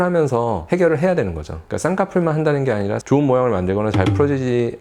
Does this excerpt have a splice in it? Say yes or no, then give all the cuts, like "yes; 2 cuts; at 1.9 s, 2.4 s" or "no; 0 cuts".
no; 0 cuts